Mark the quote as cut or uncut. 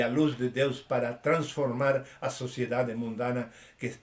uncut